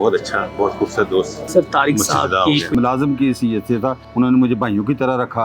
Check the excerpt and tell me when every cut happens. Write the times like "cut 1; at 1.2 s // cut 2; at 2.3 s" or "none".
cut 1; at 1.4 s // cut 2; at 2.7 s // cut 3; at 4.0 s